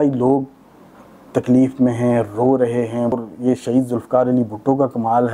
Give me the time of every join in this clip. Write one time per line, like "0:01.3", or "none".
0:03.2